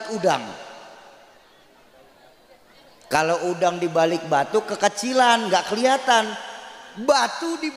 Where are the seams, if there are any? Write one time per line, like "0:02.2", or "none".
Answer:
none